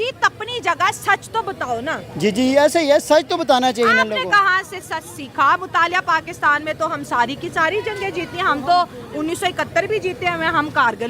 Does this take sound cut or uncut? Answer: uncut